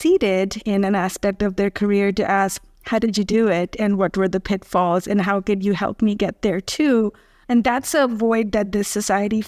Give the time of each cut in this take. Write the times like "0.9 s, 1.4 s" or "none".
none